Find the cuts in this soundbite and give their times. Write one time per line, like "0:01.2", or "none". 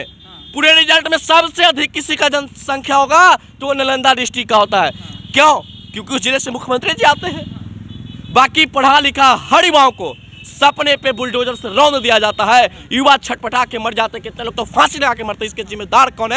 none